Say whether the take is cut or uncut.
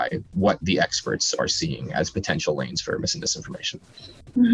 uncut